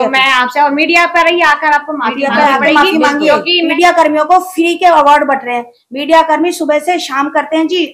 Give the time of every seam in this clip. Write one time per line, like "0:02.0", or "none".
0:03.7